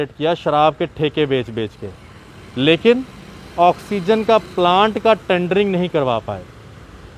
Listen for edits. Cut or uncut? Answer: uncut